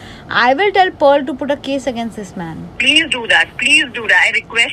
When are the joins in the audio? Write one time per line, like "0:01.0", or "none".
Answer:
none